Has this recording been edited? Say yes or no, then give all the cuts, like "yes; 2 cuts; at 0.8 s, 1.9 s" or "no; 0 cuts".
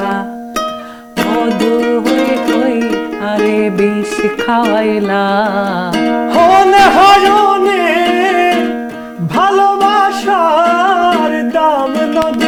no; 0 cuts